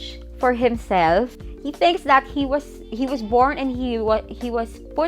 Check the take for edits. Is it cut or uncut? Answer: cut